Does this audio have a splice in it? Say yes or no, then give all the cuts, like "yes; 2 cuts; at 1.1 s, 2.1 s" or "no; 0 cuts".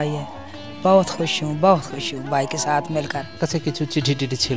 yes; 1 cut; at 3.4 s